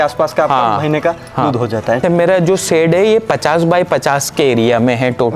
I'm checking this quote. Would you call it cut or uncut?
cut